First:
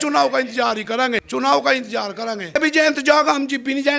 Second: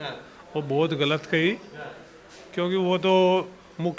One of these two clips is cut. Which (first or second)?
first